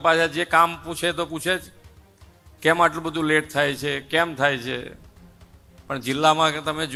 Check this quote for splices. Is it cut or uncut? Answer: uncut